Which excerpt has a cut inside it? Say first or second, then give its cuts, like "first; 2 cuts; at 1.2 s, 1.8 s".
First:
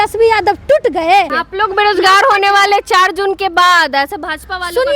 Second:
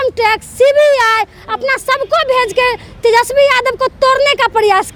first; 1 cut; at 1.4 s